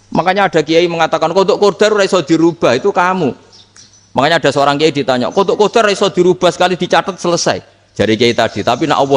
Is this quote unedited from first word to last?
yes; 0 cuts

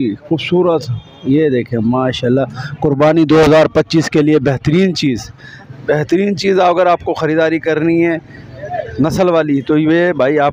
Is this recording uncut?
yes; 0 cuts

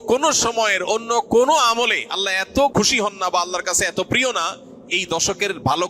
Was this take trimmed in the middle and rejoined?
yes; 1 cut; at 2.7 s

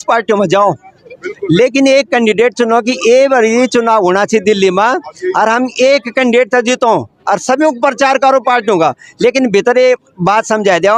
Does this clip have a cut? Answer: no; 0 cuts

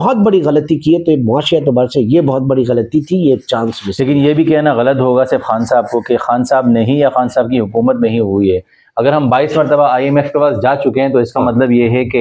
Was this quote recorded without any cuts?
yes; 0 cuts

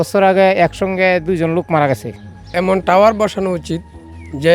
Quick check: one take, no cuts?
no; 1 cut; at 2.5 s

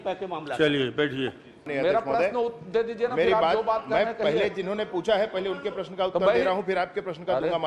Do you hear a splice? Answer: yes; 1 cut; at 1.7 s

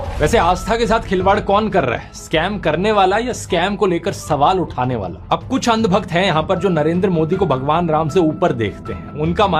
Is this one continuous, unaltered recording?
yes; 0 cuts

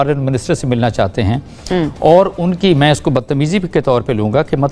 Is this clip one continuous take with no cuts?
yes; 0 cuts

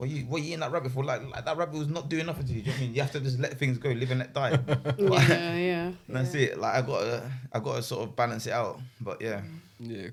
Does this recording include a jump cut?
no; 0 cuts

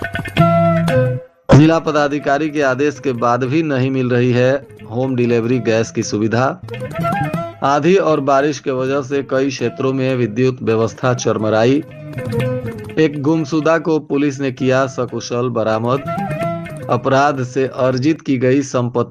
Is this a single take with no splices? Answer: no; 1 cut; at 1.3 s

